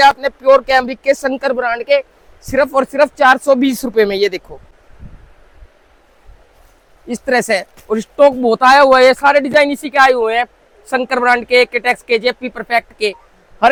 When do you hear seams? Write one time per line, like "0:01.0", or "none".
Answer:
none